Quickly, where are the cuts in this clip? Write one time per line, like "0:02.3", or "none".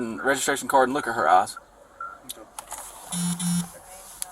none

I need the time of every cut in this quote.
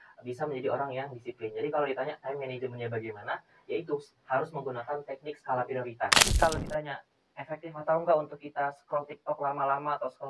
0:06.2

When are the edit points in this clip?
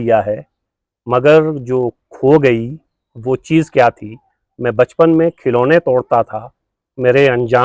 none

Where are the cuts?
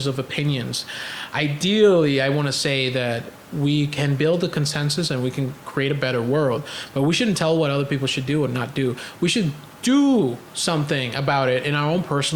none

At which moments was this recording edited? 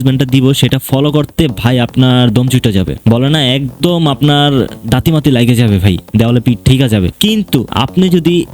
0:02.9
0:07.5

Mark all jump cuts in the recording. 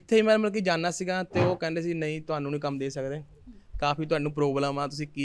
none

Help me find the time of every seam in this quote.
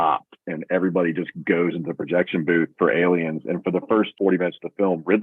0:04.1

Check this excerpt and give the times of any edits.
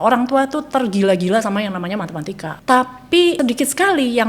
0:02.6
0:03.4

